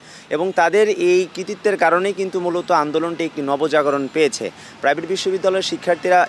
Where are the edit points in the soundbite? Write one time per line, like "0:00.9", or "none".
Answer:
none